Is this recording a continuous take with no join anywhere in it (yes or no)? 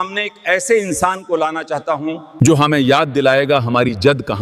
no